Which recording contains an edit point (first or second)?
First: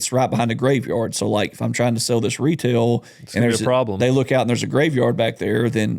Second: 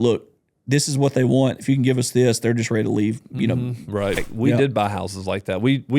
second